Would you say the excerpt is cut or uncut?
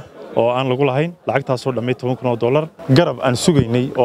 cut